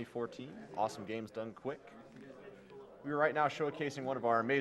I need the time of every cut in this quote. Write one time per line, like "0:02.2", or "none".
0:03.6